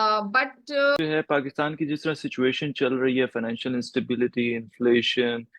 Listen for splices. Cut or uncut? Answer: cut